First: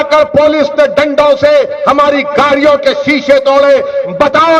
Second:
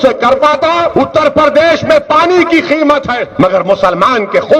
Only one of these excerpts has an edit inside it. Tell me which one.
second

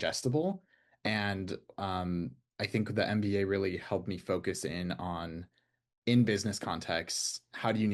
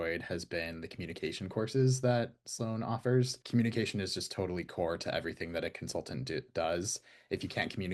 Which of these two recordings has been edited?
second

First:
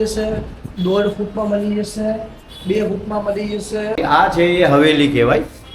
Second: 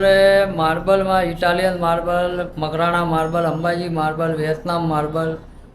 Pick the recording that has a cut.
first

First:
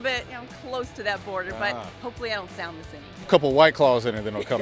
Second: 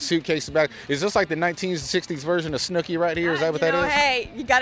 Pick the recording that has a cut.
first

